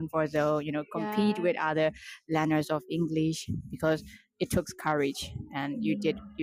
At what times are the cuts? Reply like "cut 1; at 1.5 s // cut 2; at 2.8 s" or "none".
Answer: none